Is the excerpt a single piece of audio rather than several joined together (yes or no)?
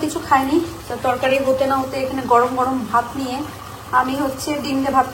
yes